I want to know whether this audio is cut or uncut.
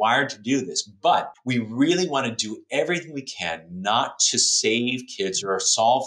cut